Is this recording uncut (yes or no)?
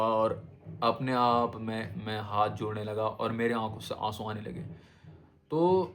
yes